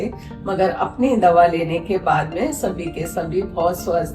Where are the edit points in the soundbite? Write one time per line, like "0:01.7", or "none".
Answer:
none

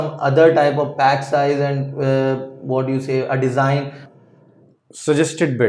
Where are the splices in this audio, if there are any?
0:04.0

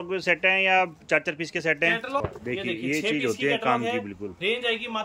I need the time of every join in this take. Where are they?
0:02.2

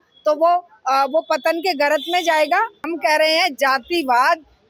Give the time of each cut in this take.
0:02.8

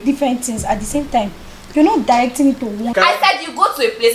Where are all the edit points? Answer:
0:02.9

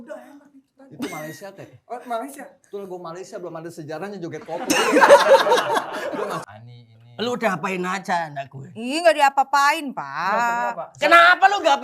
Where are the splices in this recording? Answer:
0:06.5

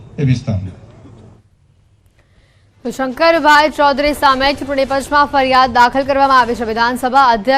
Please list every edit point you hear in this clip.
0:02.6

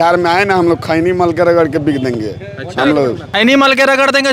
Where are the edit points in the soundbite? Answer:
0:03.2

